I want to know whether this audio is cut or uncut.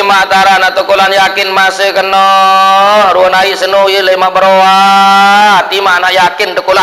uncut